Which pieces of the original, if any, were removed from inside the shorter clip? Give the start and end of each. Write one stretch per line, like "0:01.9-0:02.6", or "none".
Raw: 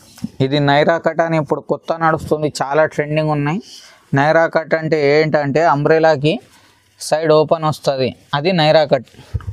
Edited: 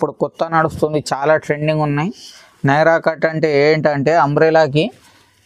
none